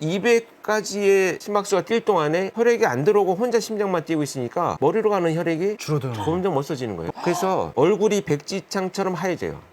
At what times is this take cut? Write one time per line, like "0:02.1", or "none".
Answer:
0:07.1